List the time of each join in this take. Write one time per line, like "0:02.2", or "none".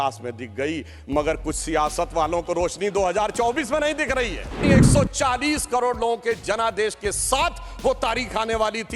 0:04.6